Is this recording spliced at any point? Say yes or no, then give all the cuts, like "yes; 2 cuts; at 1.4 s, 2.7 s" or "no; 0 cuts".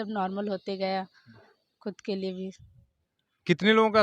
no; 0 cuts